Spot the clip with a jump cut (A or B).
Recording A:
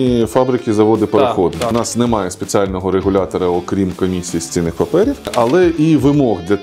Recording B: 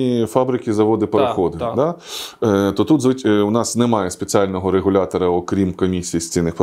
A